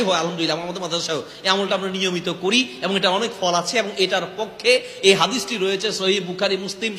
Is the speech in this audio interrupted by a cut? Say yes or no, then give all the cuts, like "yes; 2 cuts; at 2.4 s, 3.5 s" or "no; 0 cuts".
no; 0 cuts